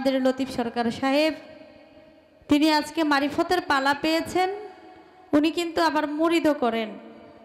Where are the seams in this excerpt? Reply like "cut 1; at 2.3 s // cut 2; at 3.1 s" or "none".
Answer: none